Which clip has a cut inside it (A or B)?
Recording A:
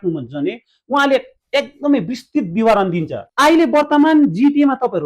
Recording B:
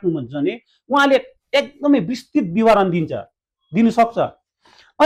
A